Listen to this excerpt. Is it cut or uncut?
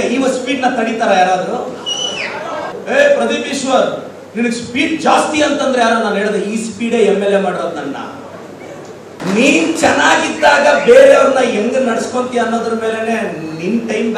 cut